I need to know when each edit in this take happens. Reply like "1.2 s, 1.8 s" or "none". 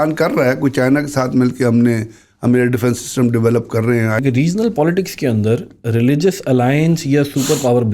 4.2 s